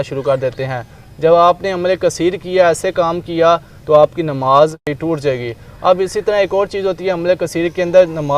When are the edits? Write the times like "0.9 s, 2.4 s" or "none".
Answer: 4.9 s